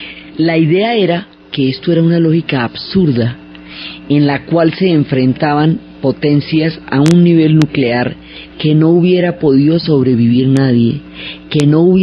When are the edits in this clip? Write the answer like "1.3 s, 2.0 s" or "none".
9.8 s